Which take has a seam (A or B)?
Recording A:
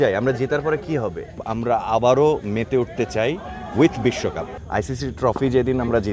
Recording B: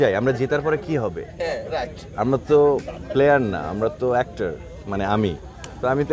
A